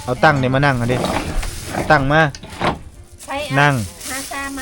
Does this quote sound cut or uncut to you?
uncut